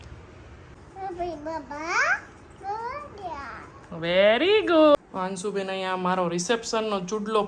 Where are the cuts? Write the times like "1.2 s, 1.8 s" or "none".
0.8 s, 4.9 s